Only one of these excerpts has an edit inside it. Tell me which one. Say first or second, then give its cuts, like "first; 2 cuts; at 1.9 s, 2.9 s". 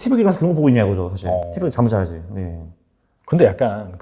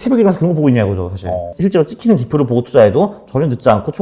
second; 1 cut; at 1.5 s